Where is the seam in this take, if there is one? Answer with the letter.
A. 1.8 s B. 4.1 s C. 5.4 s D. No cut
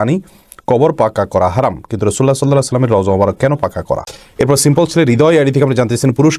B